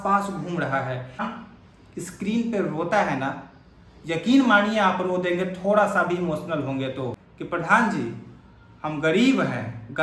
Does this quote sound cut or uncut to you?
cut